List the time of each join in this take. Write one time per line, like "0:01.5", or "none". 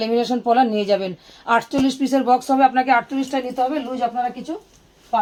none